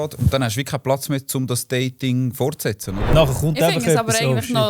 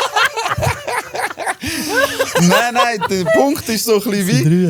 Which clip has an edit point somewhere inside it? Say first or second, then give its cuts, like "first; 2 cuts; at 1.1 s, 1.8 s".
first; 1 cut; at 3.1 s